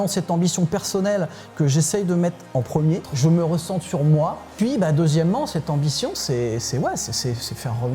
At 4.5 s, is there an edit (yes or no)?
yes